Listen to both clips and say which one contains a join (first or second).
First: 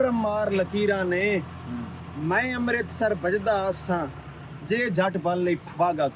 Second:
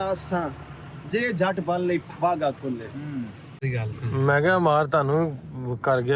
second